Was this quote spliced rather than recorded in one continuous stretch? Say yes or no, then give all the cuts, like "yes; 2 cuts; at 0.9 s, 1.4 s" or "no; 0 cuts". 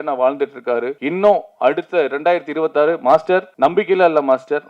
yes; 2 cuts; at 1.0 s, 3.5 s